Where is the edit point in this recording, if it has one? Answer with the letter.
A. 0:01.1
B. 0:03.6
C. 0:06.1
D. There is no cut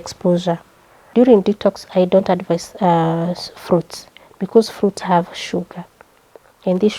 A